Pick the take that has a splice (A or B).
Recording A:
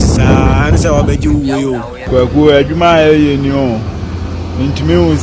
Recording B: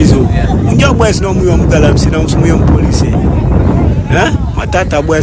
A